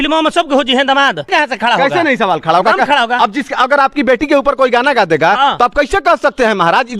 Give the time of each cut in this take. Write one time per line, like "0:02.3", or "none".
0:01.3